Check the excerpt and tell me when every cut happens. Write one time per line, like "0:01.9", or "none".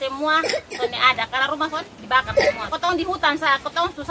0:02.7

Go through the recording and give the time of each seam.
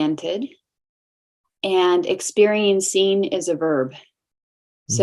none

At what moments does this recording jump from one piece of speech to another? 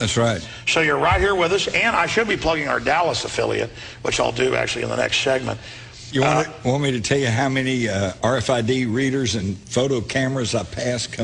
0:08.2

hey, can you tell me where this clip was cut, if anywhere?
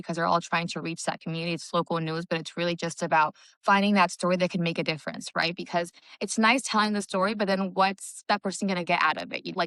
none

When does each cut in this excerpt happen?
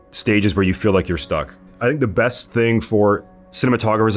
0:01.6

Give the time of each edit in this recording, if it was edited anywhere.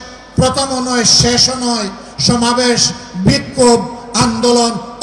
none

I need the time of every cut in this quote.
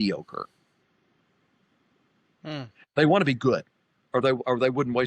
none

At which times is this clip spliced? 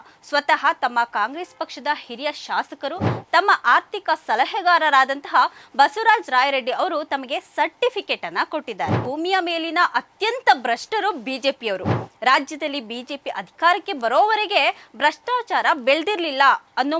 0:09.0

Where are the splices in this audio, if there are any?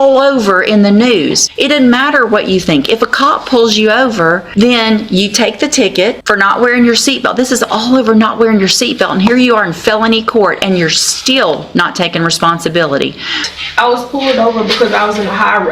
0:01.5
0:04.4
0:06.2
0:13.4

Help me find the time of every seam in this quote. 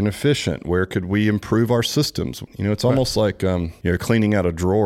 0:02.5
0:03.7

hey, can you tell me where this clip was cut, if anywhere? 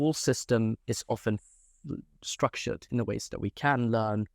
none

